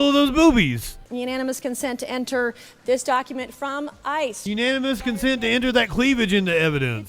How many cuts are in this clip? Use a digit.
1